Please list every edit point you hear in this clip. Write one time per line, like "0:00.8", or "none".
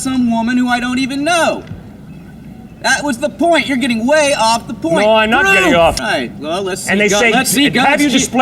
0:06.0